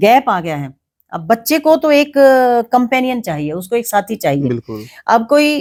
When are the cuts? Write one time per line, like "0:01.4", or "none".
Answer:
none